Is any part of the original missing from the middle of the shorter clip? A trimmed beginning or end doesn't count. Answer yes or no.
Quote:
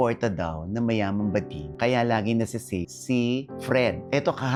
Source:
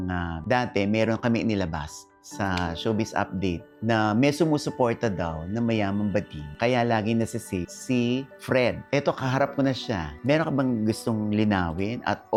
no